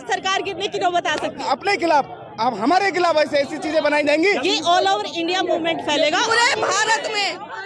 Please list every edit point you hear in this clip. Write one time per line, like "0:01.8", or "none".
0:01.4
0:04.4
0:06.3